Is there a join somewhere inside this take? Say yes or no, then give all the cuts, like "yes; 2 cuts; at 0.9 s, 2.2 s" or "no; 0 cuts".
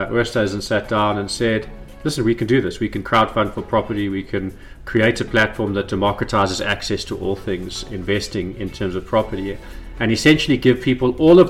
no; 0 cuts